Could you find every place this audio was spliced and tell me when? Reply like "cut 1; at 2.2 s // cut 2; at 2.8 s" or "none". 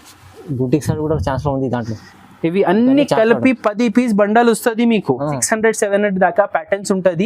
cut 1; at 5.5 s